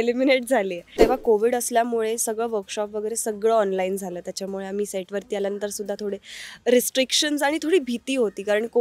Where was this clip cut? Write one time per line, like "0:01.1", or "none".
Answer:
0:01.0